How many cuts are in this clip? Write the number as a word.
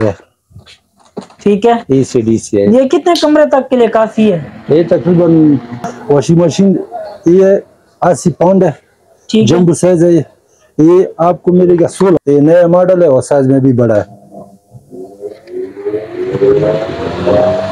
two